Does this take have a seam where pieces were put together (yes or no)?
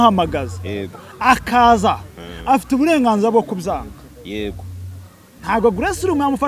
no